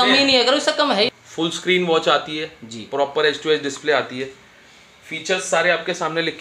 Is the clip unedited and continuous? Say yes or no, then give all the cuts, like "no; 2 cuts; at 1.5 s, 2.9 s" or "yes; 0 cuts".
no; 1 cut; at 1.1 s